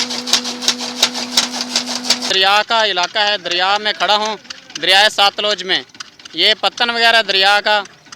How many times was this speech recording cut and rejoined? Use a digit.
1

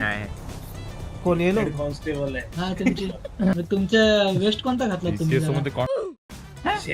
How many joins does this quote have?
1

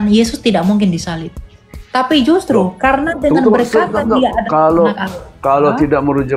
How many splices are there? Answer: 0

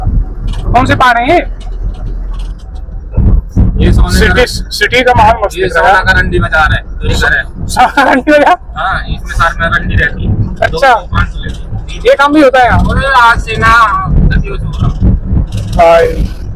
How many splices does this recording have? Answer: 0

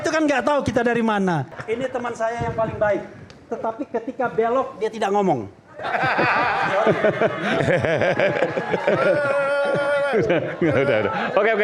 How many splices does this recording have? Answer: 1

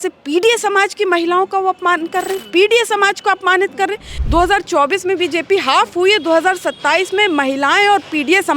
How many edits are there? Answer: 1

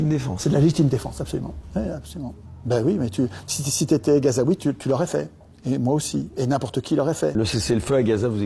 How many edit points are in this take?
2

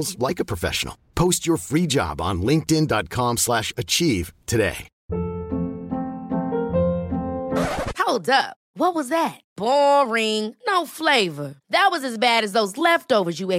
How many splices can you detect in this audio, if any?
1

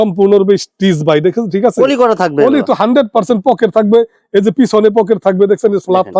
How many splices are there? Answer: 0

